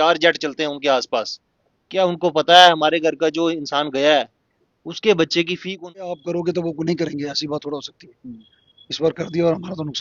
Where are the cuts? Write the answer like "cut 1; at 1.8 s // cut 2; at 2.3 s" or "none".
cut 1; at 6.1 s